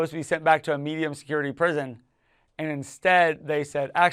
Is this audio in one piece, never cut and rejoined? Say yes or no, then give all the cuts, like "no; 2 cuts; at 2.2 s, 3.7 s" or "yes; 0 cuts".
yes; 0 cuts